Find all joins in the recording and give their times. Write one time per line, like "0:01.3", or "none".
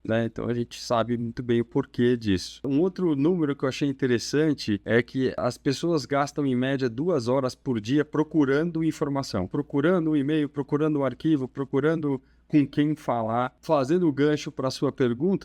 0:02.7
0:05.2
0:09.5
0:13.6